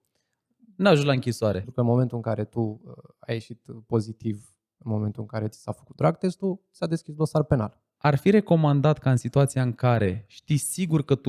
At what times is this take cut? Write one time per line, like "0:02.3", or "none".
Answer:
0:01.6
0:07.8